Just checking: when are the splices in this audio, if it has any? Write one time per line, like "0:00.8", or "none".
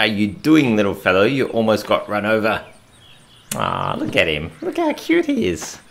none